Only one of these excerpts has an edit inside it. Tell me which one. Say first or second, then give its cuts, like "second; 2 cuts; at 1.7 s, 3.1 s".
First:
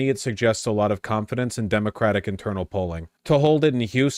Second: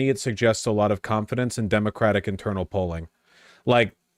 first; 1 cut; at 3.1 s